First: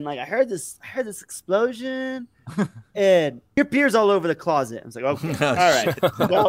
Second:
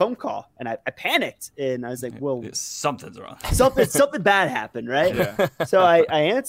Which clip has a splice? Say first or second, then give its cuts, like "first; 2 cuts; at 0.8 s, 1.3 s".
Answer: first; 1 cut; at 3.4 s